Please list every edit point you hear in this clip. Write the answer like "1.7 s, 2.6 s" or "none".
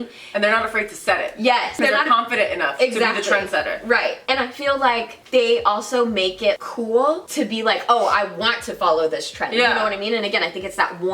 1.8 s, 6.6 s, 7.3 s

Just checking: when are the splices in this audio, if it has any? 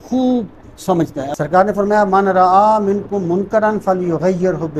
1.3 s

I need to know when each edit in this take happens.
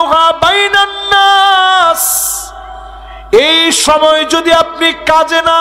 none

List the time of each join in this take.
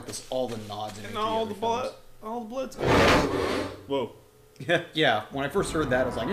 1.8 s

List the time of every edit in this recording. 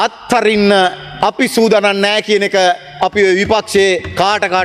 none

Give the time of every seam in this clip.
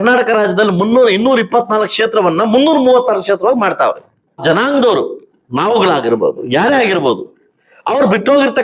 4.4 s

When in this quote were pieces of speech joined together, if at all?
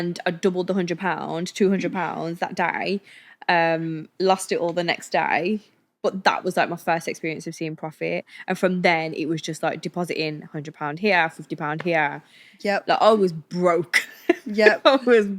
none

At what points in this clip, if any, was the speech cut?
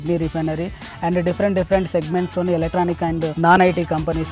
3.3 s

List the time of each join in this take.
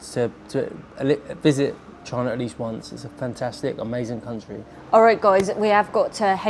none

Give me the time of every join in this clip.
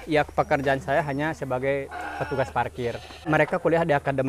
3.1 s

